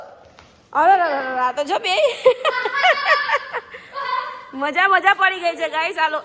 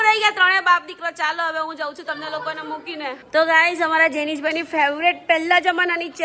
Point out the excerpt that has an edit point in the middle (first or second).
second